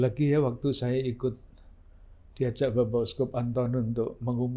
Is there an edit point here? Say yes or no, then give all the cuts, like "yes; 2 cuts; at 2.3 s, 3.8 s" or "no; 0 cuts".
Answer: no; 0 cuts